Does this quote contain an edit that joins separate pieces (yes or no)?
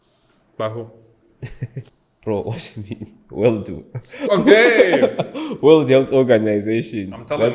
yes